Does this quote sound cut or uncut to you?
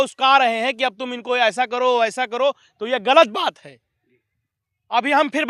uncut